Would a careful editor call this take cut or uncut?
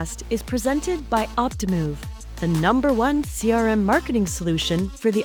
uncut